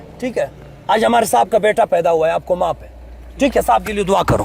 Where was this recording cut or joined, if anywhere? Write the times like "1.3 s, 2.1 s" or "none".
none